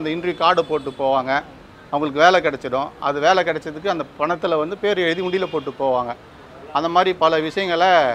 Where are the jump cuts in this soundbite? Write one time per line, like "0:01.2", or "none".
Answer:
none